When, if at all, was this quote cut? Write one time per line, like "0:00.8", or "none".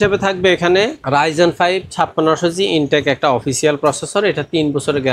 0:01.0